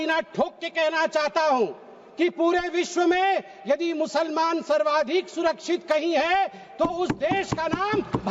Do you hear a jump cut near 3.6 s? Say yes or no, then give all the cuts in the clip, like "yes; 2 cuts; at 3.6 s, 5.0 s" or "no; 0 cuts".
no; 0 cuts